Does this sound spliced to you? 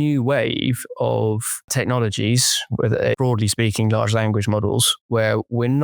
yes; 2 cuts; at 1.7 s, 3.2 s

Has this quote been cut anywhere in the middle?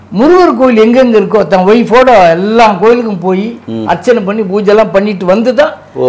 no; 0 cuts

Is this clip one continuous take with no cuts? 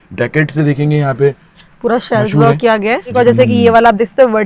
no; 1 cut; at 3.1 s

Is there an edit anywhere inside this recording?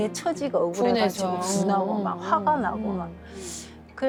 no; 0 cuts

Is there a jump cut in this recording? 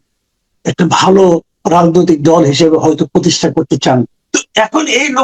yes; 1 cut; at 4.2 s

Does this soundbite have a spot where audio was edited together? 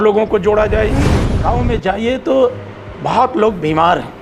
yes; 1 cut; at 1.3 s

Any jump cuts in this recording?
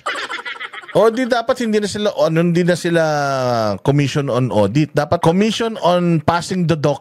yes; 1 cut; at 5.2 s

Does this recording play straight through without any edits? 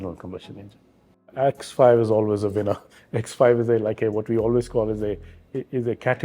no; 1 cut; at 1.3 s

